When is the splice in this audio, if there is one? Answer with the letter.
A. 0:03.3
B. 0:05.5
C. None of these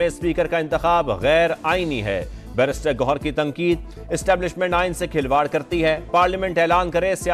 C